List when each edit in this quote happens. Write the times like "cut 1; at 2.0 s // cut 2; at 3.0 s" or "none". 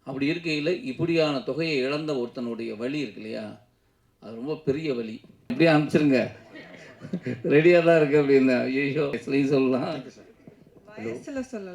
cut 1; at 5.5 s // cut 2; at 9.2 s